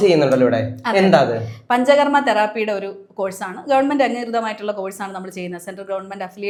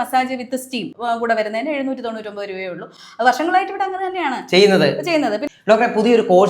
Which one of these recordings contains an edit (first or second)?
second